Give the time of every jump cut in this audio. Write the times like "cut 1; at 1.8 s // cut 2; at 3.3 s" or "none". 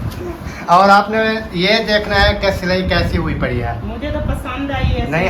none